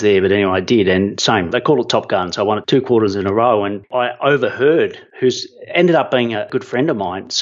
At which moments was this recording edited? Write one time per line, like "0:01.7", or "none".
0:01.5
0:02.6
0:03.8
0:05.0
0:06.4